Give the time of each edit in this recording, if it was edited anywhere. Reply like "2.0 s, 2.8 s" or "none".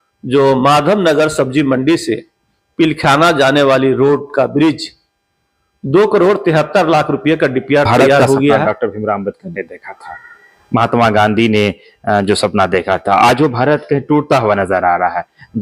8.6 s